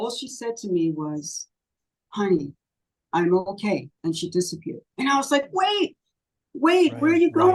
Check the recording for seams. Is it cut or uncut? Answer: cut